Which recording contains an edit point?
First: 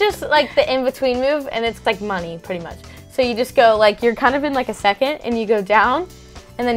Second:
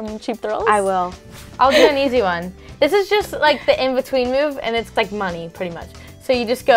second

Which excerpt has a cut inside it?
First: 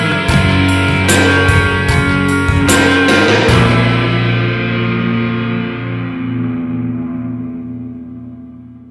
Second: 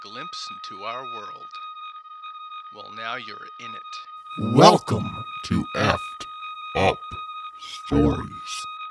first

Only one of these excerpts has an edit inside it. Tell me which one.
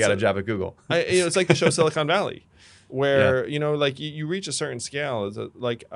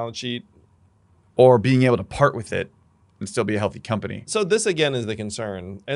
second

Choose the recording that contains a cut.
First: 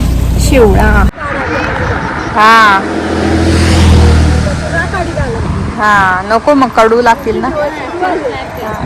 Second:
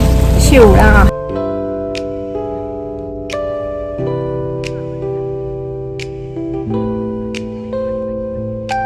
first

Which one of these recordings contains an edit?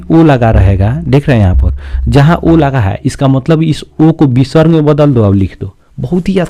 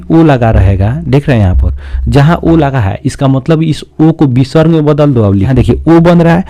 second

